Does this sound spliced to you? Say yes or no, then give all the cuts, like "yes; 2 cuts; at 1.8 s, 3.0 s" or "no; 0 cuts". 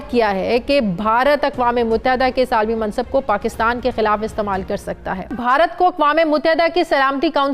yes; 1 cut; at 5.4 s